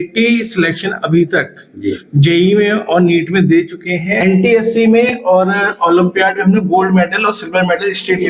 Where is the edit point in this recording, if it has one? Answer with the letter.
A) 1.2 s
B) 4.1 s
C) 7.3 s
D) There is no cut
B